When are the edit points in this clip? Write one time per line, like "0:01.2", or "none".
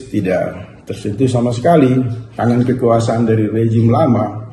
0:02.2